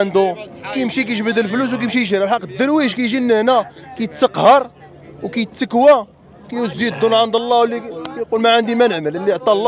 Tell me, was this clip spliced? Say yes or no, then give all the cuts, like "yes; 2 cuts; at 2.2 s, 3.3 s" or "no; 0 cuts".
no; 0 cuts